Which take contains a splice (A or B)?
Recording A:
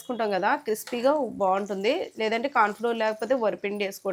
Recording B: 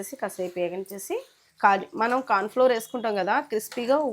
B